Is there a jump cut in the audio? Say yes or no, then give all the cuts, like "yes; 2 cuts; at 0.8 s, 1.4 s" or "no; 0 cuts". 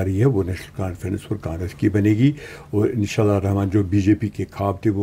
no; 0 cuts